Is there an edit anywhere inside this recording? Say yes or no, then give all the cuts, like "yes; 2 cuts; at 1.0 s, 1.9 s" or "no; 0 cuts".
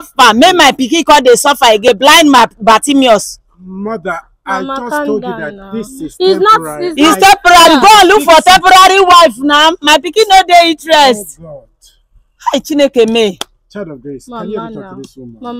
no; 0 cuts